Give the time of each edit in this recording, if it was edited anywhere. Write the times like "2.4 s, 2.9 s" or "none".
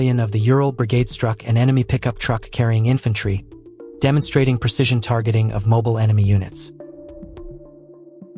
6.5 s